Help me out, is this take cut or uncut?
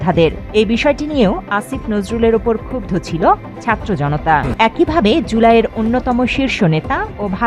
cut